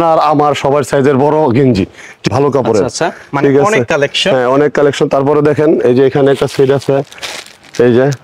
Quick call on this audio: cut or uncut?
uncut